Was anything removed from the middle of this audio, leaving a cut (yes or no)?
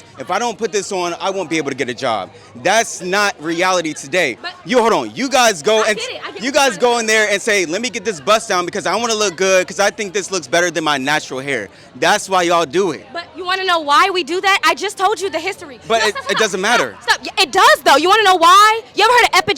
no